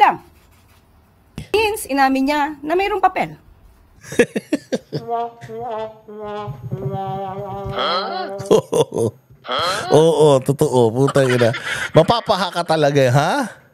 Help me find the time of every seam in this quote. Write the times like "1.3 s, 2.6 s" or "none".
1.4 s